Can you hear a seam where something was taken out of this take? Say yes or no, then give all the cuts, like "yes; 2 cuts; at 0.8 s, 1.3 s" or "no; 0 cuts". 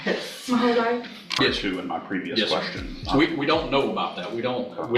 yes; 1 cut; at 1.4 s